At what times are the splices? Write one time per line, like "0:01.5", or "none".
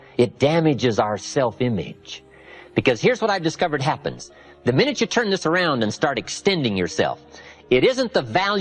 none